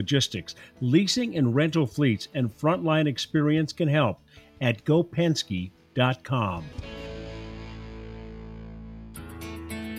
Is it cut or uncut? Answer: cut